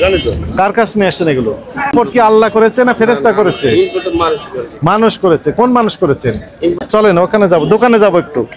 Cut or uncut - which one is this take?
cut